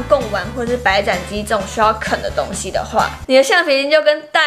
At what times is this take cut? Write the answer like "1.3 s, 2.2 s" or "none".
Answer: 3.2 s